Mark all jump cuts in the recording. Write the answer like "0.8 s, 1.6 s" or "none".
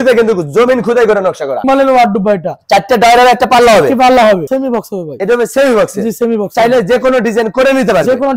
1.6 s, 4.4 s